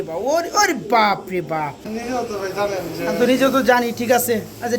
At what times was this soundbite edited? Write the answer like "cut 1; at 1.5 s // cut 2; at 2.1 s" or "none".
cut 1; at 1.8 s